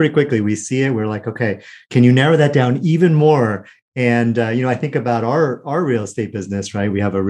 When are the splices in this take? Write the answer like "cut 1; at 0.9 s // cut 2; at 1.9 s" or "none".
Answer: cut 1; at 1.8 s